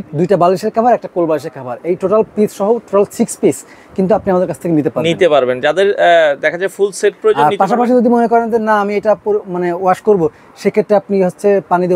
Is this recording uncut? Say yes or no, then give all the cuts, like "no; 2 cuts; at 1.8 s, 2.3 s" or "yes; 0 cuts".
yes; 0 cuts